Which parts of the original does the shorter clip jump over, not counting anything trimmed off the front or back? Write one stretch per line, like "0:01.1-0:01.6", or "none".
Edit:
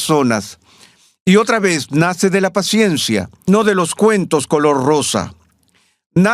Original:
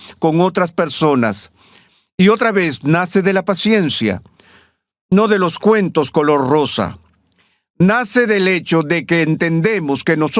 0:04.2-0:05.0